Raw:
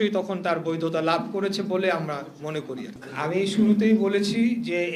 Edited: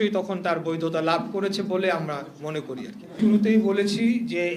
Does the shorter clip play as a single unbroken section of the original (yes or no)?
no